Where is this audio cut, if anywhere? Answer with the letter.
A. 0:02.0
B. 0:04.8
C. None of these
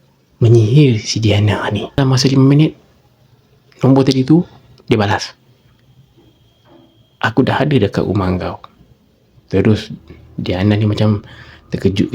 A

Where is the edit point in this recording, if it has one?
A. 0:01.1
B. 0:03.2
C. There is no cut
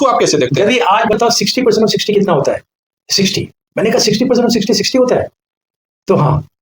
A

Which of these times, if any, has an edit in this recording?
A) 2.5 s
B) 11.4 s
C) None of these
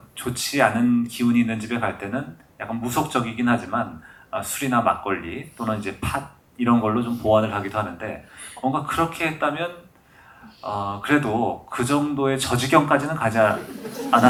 C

